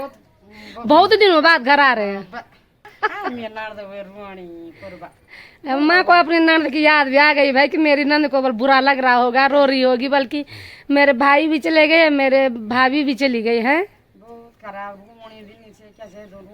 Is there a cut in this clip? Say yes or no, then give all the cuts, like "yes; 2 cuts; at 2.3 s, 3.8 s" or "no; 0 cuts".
yes; 1 cut; at 2.9 s